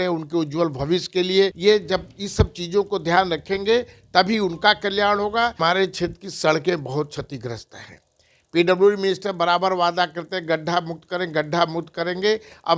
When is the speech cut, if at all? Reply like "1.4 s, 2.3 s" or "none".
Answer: 1.6 s, 5.6 s